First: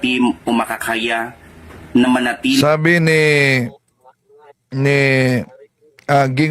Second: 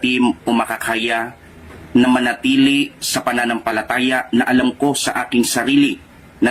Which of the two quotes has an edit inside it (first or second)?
second